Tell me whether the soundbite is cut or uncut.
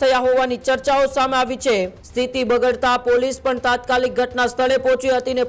cut